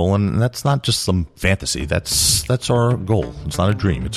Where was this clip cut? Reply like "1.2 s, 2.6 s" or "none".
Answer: none